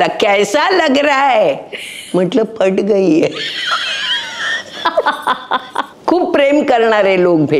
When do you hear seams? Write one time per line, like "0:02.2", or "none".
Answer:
0:05.9